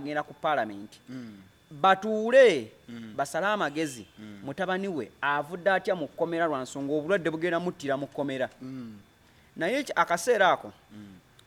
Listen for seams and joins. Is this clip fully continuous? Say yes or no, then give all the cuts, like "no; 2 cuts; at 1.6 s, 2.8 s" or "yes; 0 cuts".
yes; 0 cuts